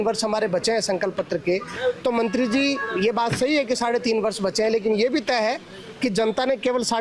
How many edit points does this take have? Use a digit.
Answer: 0